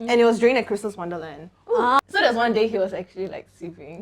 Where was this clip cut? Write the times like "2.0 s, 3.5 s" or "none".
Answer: 2.0 s